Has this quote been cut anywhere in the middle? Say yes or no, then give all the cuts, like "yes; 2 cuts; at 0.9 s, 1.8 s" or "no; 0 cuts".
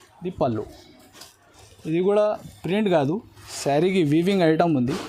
no; 0 cuts